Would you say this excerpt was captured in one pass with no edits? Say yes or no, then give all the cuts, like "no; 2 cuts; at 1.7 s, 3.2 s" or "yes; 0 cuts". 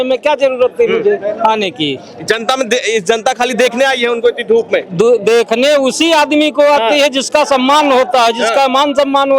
yes; 0 cuts